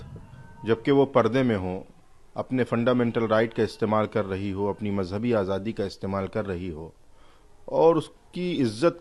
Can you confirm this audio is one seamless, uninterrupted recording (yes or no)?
yes